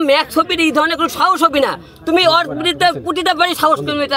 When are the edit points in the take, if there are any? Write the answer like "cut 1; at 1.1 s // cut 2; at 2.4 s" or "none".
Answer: none

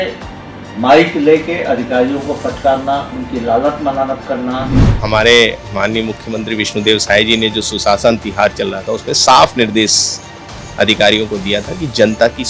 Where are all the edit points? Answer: cut 1; at 4.9 s

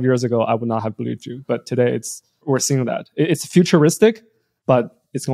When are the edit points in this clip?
cut 1; at 2.5 s

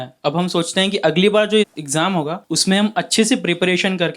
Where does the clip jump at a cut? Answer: cut 1; at 2.4 s

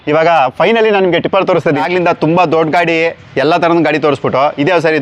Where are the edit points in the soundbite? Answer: cut 1; at 1.8 s

